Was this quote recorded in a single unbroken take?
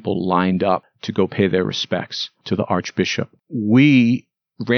no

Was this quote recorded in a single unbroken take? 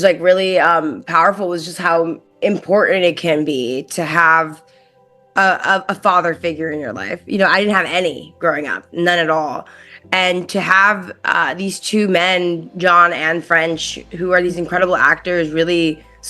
no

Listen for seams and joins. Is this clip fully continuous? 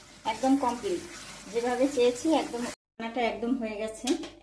no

